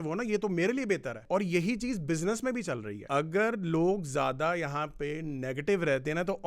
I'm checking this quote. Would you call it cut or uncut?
cut